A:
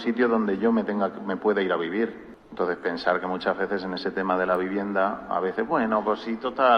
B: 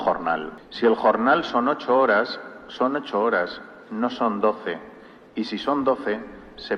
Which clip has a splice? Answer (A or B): A